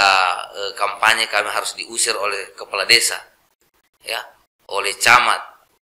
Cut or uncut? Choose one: uncut